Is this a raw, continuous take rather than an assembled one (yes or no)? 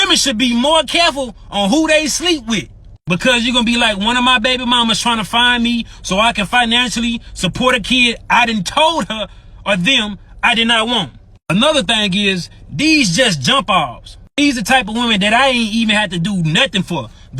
no